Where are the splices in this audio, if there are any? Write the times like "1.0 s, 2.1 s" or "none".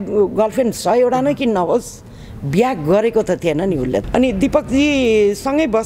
4.1 s

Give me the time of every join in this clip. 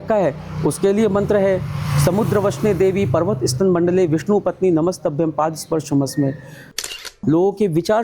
7.1 s

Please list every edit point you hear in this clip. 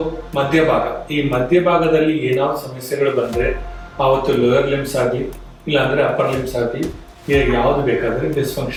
none

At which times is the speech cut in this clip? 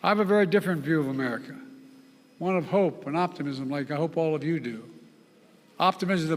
none

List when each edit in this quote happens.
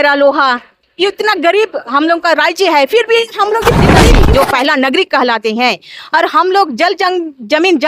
4.0 s

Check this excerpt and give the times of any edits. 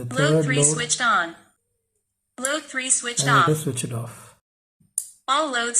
4.8 s

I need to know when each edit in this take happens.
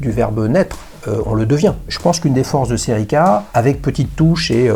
1.9 s, 3.5 s

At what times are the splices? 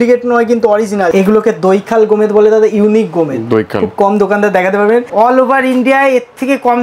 1.1 s, 5.1 s

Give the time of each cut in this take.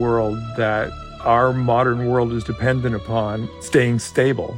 1.0 s, 3.5 s

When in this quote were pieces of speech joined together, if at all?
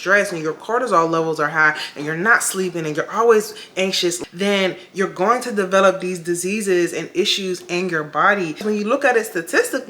4.2 s, 8.6 s

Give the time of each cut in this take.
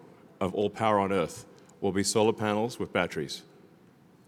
none

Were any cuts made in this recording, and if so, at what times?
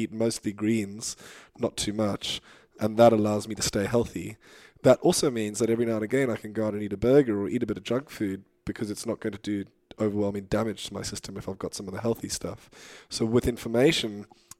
2.7 s

